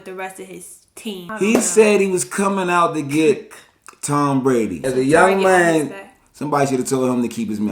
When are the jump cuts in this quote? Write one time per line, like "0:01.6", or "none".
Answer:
0:01.3
0:04.8